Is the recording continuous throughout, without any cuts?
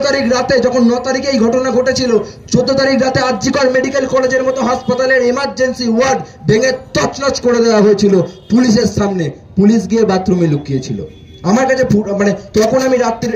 yes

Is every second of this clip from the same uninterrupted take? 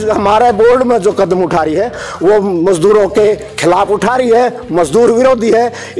yes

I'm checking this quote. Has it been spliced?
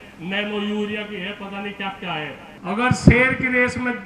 yes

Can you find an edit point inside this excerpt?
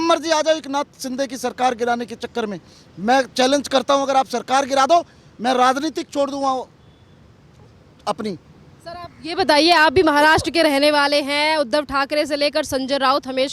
no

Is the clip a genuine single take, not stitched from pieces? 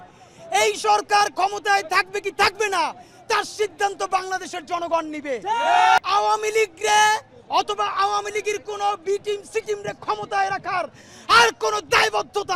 no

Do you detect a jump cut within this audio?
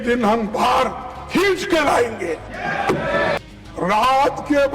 yes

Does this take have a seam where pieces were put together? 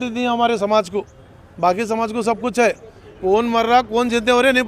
yes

